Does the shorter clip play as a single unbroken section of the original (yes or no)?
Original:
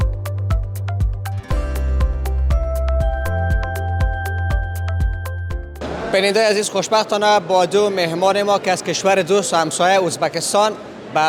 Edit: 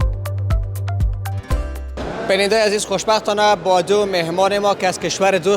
no